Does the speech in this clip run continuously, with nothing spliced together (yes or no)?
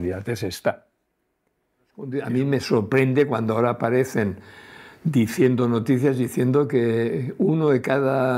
no